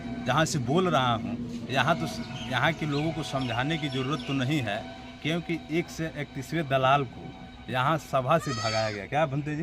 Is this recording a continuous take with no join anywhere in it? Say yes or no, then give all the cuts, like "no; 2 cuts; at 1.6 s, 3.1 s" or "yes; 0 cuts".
yes; 0 cuts